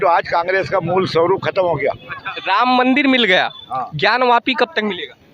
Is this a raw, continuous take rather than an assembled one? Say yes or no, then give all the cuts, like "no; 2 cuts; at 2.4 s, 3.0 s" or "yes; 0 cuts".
no; 1 cut; at 2.3 s